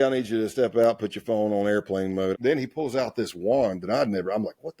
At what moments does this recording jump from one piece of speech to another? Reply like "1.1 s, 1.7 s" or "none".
2.3 s